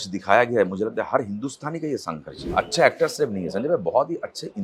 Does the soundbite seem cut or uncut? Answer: cut